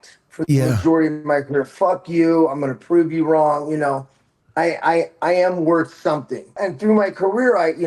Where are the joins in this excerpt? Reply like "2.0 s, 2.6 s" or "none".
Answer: 6.6 s